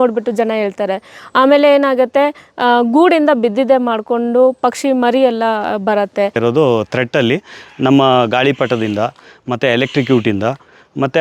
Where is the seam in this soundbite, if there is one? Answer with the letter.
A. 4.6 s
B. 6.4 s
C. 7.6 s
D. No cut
B